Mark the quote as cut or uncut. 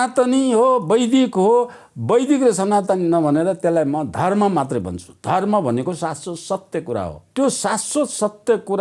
cut